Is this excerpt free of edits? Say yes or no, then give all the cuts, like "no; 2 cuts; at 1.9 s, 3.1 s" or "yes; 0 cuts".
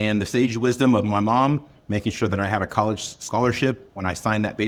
yes; 0 cuts